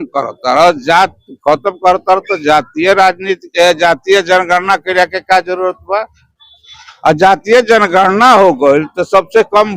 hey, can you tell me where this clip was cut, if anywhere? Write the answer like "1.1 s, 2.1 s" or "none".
none